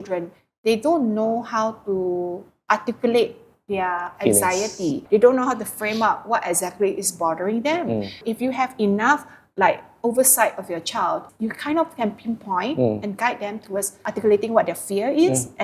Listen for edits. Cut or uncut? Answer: cut